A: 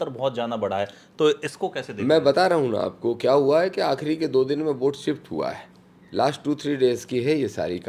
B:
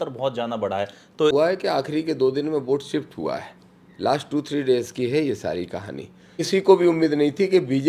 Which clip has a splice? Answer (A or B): B